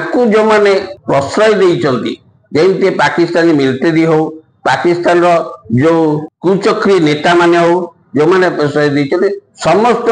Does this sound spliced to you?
yes; 2 cuts; at 0.9 s, 6.3 s

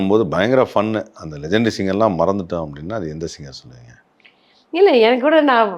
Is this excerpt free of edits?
yes; 0 cuts

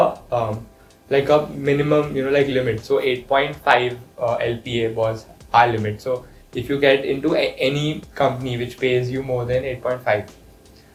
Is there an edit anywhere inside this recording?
no; 0 cuts

